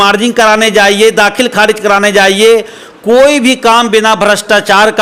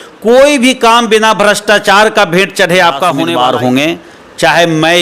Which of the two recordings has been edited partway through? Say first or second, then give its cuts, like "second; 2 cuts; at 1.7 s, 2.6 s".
second; 1 cut; at 3.2 s